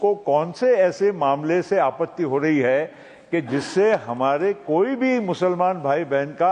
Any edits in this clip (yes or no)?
no